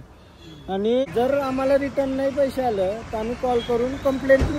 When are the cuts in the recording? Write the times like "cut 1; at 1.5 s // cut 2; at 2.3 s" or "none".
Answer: cut 1; at 1.1 s